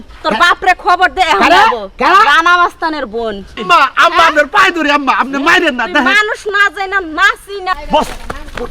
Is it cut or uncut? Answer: cut